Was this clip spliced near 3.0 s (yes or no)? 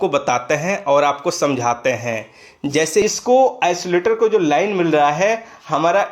yes